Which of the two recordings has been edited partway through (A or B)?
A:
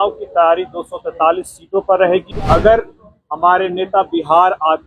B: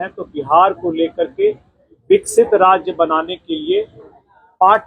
A